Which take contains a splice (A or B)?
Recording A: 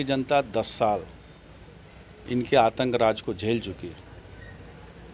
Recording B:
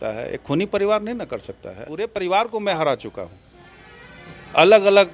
B